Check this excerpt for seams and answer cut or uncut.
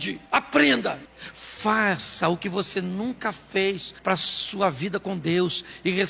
cut